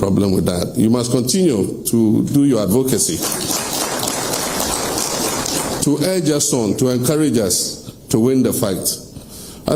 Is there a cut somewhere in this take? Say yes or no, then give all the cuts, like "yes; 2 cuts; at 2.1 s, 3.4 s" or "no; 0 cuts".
no; 0 cuts